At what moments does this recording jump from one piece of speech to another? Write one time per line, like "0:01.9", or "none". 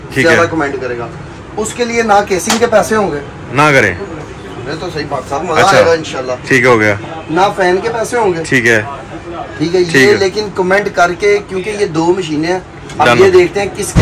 none